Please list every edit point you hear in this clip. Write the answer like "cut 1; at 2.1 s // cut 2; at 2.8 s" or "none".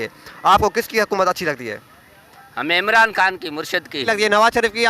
cut 1; at 4.0 s